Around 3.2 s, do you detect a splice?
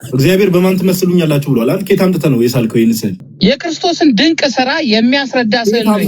yes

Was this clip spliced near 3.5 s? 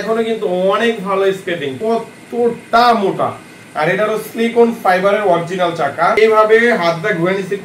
no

